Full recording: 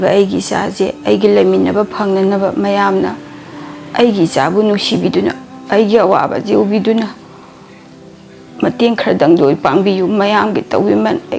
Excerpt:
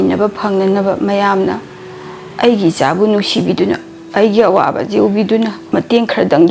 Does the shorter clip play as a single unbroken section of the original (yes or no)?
no